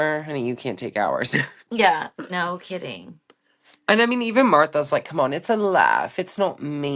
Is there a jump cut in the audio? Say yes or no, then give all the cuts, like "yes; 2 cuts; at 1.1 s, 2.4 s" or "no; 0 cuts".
no; 0 cuts